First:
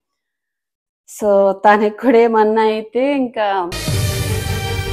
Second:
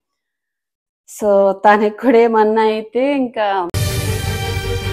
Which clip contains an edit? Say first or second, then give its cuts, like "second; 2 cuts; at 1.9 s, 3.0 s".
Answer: second; 1 cut; at 3.7 s